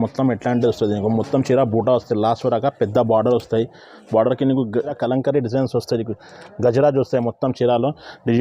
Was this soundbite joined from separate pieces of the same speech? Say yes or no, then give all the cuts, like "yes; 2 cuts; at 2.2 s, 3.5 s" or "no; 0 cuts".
yes; 1 cut; at 4.8 s